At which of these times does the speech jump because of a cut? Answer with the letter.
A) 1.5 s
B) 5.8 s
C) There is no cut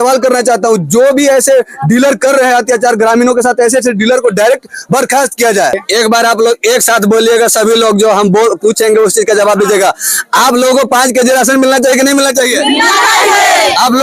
B